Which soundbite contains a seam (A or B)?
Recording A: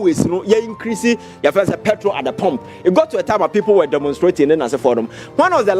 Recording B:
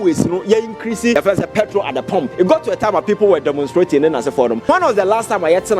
B